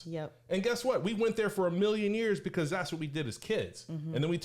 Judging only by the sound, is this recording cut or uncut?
uncut